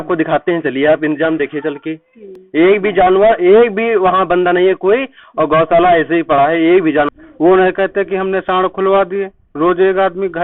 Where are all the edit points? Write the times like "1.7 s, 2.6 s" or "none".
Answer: 7.1 s